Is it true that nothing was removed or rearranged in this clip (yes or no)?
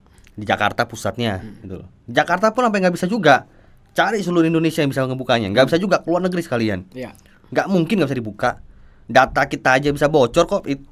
yes